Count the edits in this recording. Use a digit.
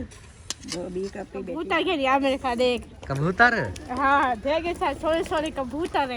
1